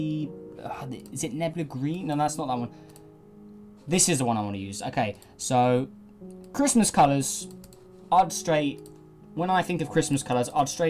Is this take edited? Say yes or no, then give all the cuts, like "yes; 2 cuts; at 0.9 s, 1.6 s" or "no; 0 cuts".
yes; 1 cut; at 5.7 s